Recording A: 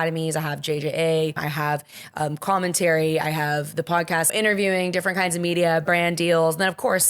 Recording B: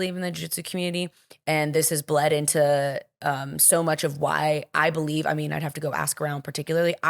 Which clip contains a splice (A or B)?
A